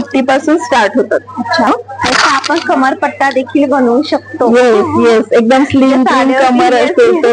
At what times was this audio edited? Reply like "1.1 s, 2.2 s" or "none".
1.7 s